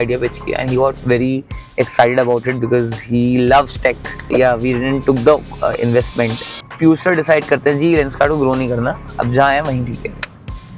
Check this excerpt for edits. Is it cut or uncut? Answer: cut